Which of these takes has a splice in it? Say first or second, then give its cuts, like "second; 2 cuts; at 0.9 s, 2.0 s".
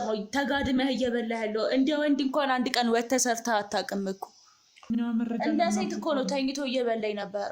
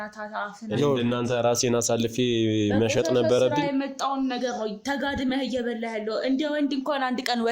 first; 1 cut; at 4.9 s